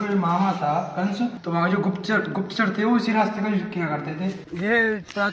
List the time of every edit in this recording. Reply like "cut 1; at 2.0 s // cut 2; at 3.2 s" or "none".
cut 1; at 1.4 s // cut 2; at 4.4 s